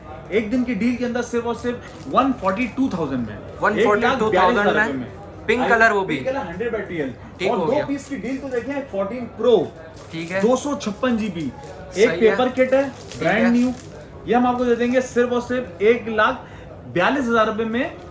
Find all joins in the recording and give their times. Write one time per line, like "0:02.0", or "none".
none